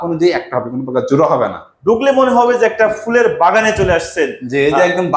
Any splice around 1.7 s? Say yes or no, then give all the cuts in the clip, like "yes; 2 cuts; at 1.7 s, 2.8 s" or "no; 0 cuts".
yes; 1 cut; at 1.7 s